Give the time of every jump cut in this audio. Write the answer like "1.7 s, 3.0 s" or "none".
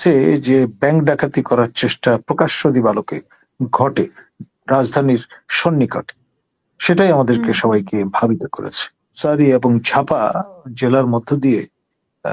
9.2 s